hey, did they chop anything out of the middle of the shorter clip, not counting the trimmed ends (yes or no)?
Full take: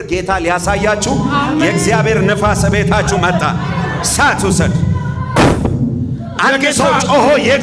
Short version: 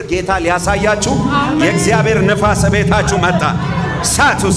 no